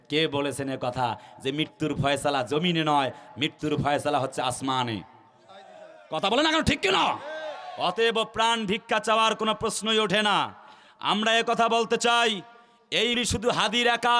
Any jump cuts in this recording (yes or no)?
yes